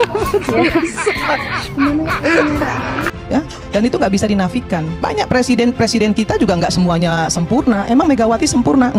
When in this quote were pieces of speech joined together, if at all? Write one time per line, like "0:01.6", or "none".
0:03.2